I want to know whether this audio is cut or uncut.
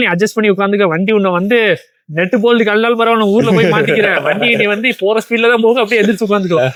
uncut